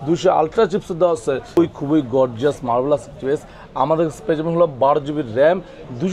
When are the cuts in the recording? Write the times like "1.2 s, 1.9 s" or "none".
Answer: 1.6 s